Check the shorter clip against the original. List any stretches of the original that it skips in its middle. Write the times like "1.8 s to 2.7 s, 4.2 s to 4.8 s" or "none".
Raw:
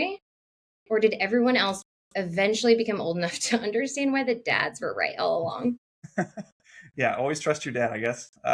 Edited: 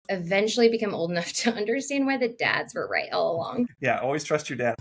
5.8 s to 6.9 s